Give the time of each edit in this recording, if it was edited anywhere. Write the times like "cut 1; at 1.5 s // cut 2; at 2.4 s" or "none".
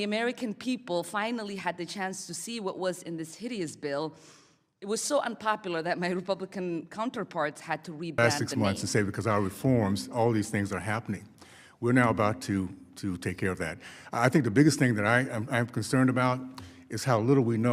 cut 1; at 8.2 s